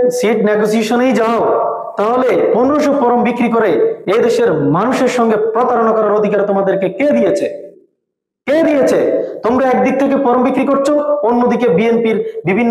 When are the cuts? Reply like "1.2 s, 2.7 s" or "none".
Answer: none